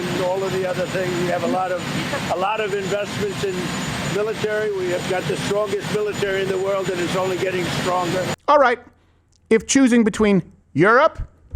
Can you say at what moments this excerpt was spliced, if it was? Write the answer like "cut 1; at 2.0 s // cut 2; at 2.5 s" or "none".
cut 1; at 8.3 s